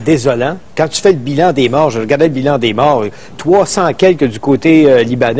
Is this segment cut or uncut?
cut